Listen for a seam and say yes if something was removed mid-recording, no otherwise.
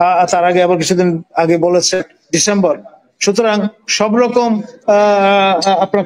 no